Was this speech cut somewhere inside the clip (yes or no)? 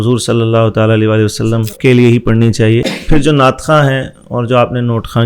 yes